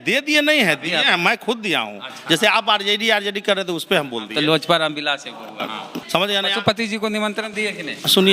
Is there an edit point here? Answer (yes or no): yes